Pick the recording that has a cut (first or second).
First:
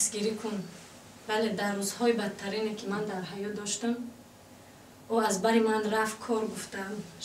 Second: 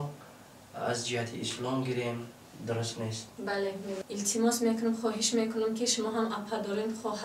second